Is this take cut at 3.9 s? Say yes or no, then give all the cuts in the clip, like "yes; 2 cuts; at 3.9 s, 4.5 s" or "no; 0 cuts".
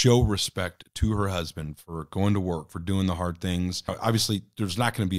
yes; 1 cut; at 3.9 s